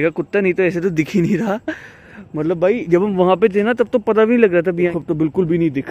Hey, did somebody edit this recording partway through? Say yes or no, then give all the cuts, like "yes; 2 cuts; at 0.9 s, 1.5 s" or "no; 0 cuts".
yes; 1 cut; at 4.9 s